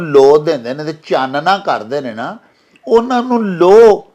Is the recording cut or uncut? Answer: uncut